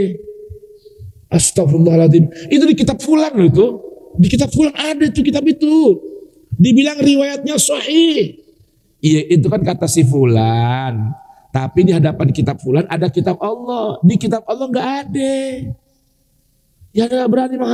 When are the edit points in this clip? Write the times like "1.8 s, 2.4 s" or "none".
none